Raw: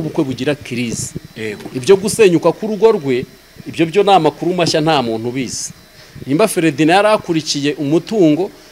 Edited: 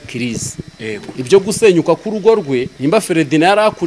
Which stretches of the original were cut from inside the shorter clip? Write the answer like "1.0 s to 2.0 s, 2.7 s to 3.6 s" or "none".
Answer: 3.3 s to 6.2 s